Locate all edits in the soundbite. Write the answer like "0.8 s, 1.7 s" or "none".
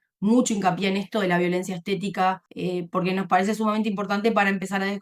2.5 s